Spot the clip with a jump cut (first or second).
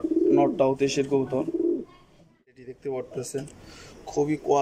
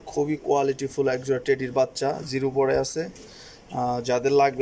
first